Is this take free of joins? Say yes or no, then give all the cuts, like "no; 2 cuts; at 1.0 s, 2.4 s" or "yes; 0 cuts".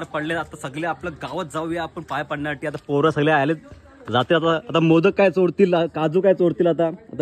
yes; 0 cuts